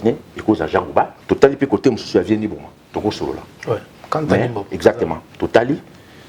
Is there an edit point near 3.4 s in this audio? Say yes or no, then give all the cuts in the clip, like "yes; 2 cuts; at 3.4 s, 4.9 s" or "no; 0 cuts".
no; 1 cut; at 1.2 s